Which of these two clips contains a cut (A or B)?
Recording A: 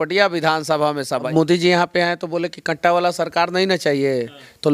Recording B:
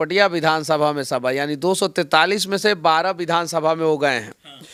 A